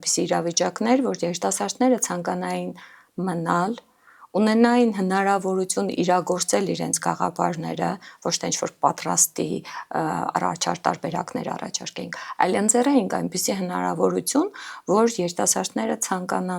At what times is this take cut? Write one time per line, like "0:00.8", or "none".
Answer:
none